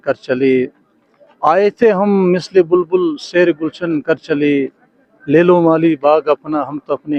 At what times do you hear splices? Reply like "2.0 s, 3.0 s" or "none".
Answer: none